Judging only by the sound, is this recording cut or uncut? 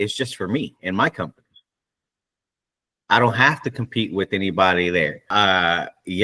cut